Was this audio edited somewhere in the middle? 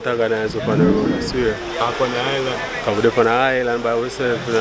no; 0 cuts

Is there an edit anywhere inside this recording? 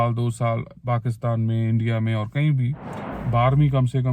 yes; 1 cut; at 3.1 s

